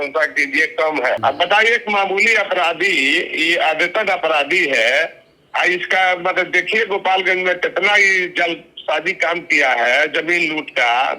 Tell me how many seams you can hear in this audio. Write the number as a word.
one